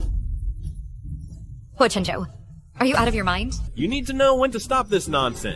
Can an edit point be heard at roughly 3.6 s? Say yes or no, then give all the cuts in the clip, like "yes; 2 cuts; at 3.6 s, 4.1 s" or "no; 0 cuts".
yes; 1 cut; at 3.6 s